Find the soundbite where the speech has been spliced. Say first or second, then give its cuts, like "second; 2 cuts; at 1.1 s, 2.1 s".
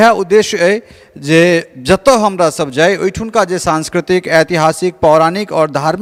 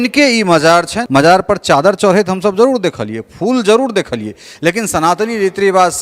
second; 1 cut; at 1.0 s